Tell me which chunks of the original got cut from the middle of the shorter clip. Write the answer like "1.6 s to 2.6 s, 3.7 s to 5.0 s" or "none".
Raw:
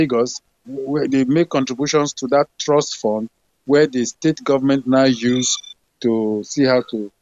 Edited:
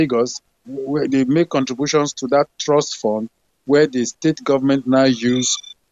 none